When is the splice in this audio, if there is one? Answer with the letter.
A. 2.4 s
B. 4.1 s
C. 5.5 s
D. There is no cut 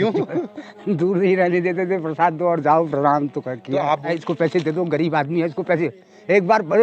B